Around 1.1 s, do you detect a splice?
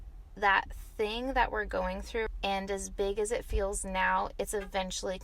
no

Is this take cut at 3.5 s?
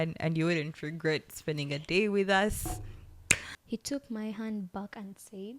yes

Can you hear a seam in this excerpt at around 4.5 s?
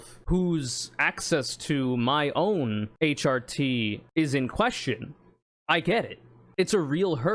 no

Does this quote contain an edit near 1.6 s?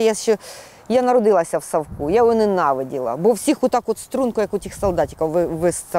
no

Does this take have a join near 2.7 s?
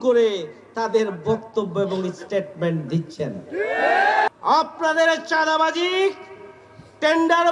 no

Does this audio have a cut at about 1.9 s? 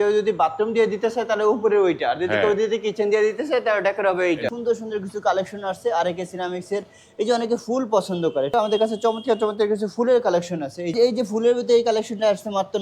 no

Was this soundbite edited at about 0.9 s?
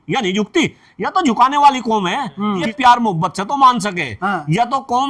no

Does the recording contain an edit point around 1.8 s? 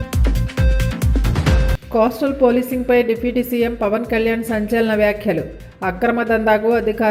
yes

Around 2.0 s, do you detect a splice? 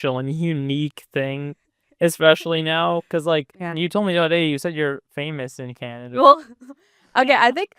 no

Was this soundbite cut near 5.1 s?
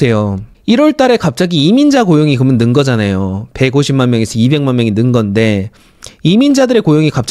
no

